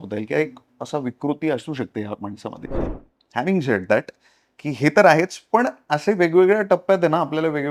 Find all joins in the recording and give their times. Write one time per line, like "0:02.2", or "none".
0:03.0